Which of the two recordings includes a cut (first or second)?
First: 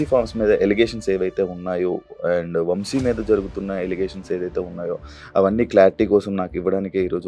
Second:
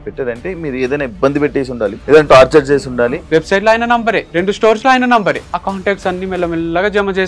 second